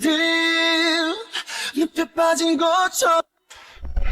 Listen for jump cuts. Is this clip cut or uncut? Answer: cut